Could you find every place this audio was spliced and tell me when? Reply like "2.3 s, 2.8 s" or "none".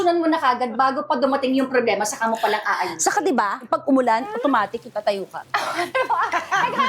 5.4 s